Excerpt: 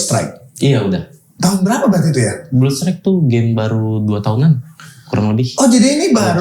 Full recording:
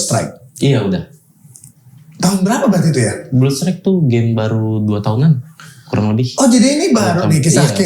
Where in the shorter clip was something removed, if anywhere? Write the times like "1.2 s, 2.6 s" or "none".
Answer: 1.2 s